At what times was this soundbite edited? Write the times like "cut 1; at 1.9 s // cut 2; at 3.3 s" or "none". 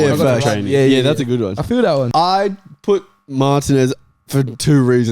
cut 1; at 2.1 s